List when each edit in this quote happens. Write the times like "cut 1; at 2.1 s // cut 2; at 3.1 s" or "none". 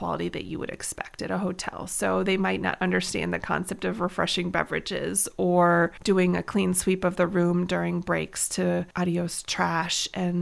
cut 1; at 6.0 s // cut 2; at 8.9 s